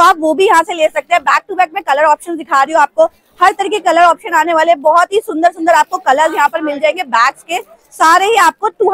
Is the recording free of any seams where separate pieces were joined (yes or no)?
yes